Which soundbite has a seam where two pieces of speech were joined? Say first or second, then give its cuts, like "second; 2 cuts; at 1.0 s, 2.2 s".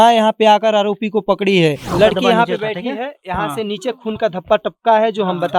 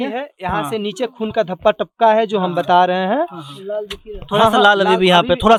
first; 1 cut; at 1.8 s